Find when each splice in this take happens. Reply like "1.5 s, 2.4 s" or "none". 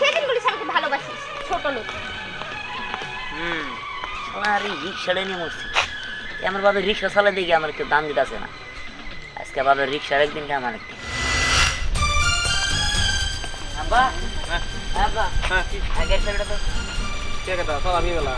none